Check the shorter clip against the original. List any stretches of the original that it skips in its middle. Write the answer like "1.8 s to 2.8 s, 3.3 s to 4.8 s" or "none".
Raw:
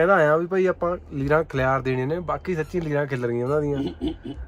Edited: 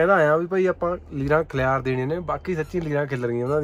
none